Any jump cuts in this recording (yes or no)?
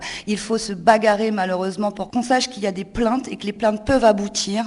yes